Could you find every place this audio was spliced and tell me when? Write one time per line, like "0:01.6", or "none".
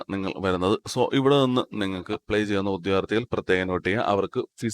0:02.1